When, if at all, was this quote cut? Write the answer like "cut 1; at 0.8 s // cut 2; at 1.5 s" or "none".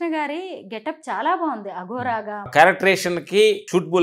cut 1; at 2.5 s